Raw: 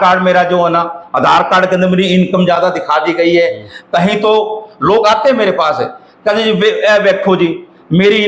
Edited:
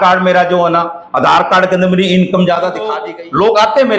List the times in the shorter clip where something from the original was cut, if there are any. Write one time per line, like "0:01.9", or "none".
0:03.0